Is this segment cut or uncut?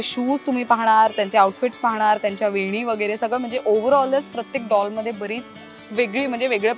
uncut